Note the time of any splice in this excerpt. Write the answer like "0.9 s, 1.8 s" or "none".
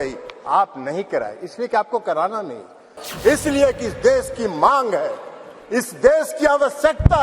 3.0 s